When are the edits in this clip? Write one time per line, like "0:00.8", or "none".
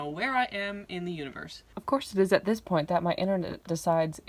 0:01.6